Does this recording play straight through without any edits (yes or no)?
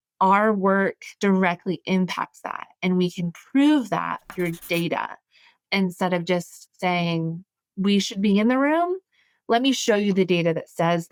yes